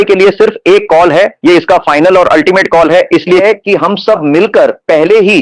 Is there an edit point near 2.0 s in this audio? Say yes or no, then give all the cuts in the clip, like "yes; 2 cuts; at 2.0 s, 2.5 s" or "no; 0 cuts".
no; 1 cut; at 3.4 s